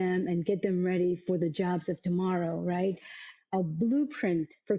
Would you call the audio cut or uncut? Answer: cut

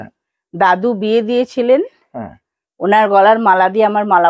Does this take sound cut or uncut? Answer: uncut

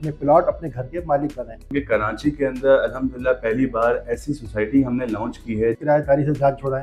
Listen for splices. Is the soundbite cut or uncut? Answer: cut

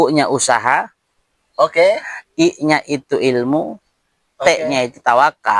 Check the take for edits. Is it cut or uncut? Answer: uncut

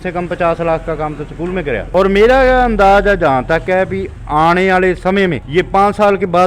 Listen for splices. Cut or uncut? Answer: cut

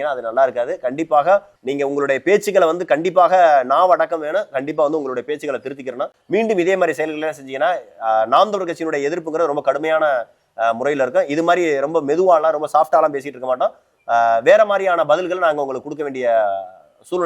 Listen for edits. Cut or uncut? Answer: cut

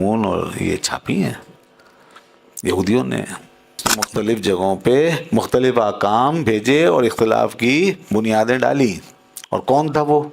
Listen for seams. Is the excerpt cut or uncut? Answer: cut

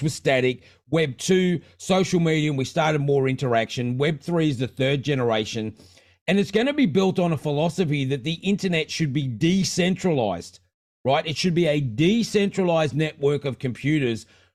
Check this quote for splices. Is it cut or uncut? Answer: uncut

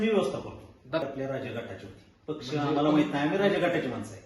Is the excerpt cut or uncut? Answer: cut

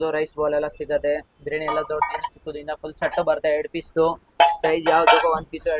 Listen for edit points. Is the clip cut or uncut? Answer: uncut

